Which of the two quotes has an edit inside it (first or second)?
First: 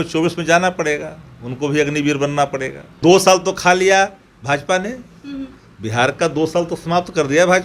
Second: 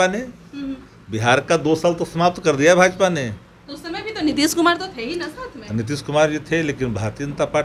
first